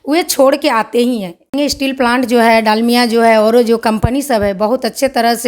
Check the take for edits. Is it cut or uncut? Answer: cut